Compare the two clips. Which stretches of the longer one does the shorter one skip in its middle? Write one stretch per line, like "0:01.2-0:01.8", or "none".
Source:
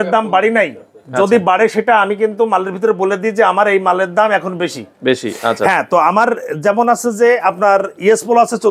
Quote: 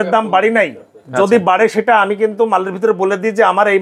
none

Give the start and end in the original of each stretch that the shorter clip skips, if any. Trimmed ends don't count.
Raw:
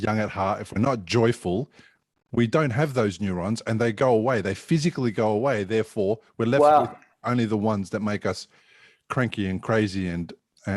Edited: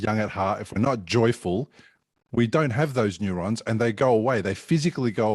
none

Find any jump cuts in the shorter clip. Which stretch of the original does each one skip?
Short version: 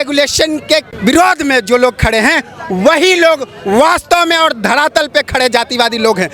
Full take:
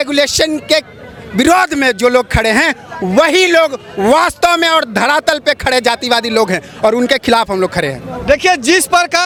0:00.9-0:01.2

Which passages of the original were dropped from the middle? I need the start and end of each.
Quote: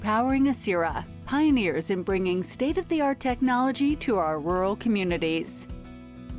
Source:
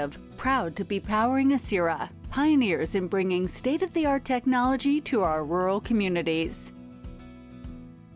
0:06.5-0:06.8

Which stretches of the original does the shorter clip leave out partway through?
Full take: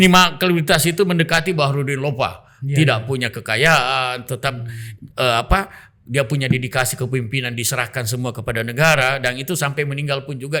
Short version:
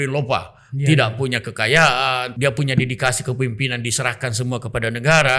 0:04.2-0:06.0

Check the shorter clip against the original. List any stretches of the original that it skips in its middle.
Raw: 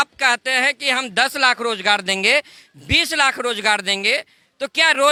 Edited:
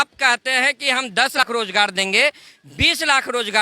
0:01.4-0:01.5

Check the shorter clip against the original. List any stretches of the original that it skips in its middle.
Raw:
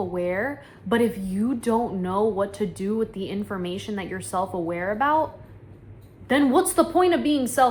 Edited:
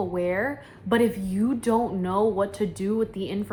none

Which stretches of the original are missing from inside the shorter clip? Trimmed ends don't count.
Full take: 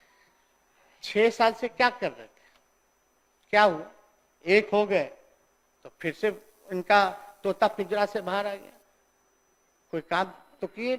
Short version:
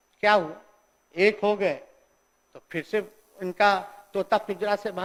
none

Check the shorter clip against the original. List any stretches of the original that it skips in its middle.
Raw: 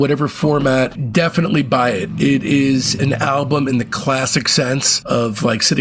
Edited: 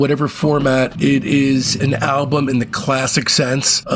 0:00.9-0:02.1

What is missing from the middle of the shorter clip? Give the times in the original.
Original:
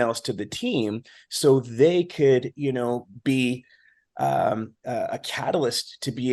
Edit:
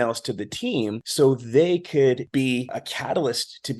0:01.0-0:01.3
0:02.6-0:04.7

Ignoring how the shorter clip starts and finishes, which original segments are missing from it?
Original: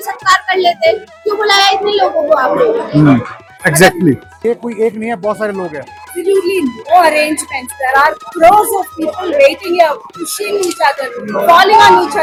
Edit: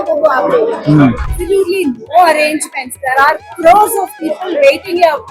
0:03.4-0:06.1

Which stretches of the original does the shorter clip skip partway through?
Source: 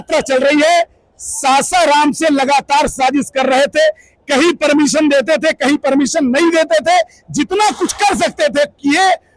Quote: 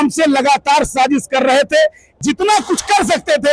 0:04.1-0:07.2

